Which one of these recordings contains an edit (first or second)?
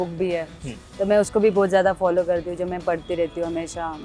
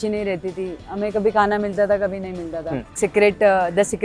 second